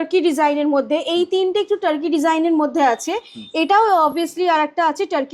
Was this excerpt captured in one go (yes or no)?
yes